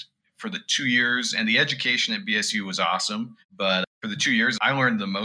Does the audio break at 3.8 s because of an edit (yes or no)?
yes